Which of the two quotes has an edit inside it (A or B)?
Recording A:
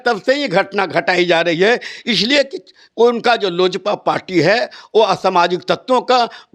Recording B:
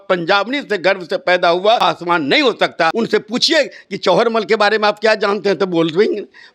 B